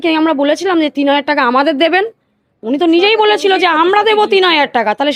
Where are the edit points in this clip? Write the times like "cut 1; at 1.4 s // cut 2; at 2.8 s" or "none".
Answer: none